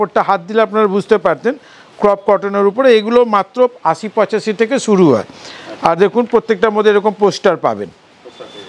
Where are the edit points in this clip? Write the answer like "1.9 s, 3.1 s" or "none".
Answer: none